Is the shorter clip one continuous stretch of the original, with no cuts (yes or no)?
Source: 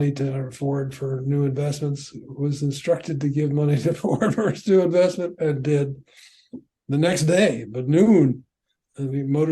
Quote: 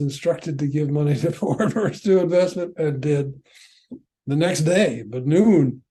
yes